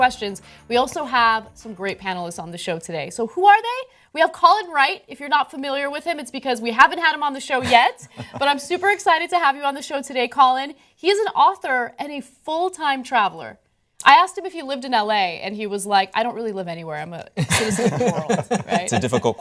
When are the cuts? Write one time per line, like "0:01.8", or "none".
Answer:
none